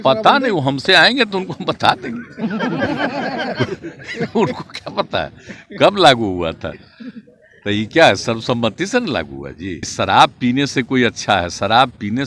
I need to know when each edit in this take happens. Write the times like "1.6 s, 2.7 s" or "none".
9.9 s